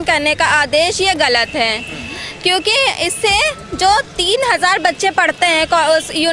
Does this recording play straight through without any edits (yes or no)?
yes